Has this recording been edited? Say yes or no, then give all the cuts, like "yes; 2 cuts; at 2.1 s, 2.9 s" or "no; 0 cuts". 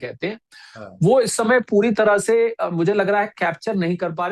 no; 0 cuts